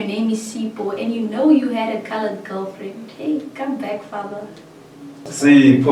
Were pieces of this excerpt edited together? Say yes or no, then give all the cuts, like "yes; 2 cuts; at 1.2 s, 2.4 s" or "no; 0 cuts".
no; 0 cuts